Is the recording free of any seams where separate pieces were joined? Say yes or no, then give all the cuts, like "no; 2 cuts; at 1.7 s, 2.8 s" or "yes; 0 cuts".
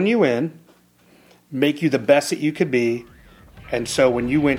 yes; 0 cuts